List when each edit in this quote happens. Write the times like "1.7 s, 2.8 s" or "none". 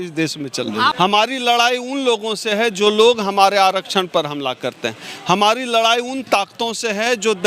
0.9 s